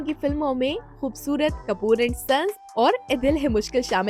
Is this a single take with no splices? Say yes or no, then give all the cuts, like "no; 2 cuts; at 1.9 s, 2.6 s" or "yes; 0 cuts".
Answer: yes; 0 cuts